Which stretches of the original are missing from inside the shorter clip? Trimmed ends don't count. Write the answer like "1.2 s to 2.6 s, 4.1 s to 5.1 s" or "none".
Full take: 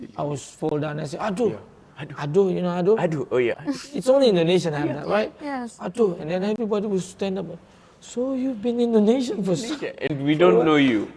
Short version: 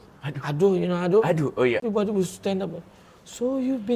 3.6 s to 6.6 s